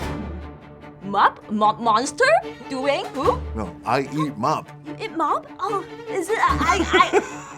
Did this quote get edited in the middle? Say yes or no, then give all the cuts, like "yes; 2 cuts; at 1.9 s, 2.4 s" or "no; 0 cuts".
yes; 1 cut; at 1.0 s